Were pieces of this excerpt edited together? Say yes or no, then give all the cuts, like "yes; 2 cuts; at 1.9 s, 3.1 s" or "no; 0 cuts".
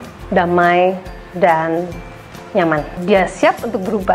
yes; 1 cut; at 3.0 s